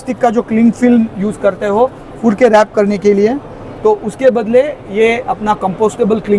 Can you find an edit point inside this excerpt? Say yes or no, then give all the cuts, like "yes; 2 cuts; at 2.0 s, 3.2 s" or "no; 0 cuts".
no; 0 cuts